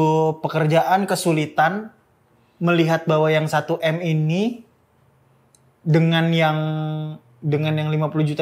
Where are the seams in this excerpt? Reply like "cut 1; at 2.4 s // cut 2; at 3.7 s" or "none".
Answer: none